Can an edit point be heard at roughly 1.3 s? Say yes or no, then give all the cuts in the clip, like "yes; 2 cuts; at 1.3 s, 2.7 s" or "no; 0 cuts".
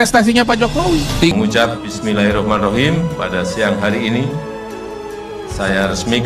yes; 1 cut; at 1.3 s